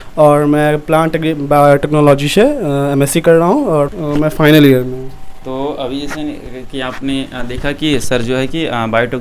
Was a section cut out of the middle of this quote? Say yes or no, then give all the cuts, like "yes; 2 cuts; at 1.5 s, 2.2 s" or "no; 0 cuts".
no; 0 cuts